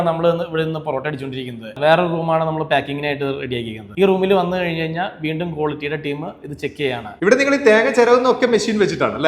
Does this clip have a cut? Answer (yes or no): yes